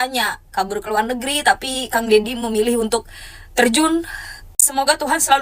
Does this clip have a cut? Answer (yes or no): yes